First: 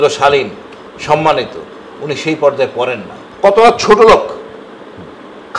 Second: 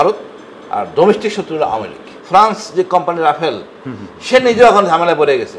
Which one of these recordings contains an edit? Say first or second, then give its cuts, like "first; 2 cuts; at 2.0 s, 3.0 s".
second; 1 cut; at 2.1 s